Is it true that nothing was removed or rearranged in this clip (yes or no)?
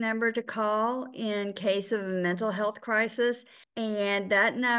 yes